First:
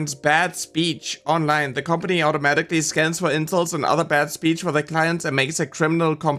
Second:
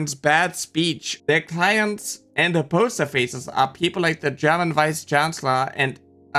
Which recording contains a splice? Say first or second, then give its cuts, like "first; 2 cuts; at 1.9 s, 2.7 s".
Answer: second; 1 cut; at 1.1 s